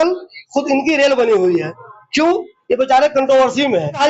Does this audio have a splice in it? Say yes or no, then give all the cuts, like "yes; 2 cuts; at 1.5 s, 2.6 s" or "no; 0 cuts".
no; 0 cuts